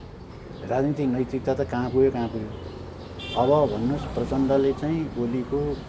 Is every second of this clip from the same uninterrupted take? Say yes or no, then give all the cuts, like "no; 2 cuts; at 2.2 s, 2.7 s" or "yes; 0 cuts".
yes; 0 cuts